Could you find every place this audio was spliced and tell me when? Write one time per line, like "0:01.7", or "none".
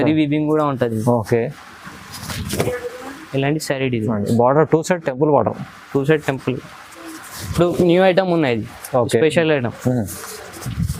none